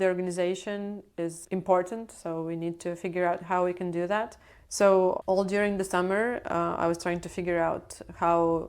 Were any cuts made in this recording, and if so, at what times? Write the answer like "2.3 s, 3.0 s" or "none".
1.1 s